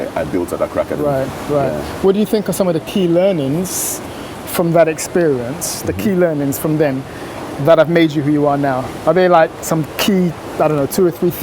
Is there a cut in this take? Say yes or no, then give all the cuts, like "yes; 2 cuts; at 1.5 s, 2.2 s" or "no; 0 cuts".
no; 0 cuts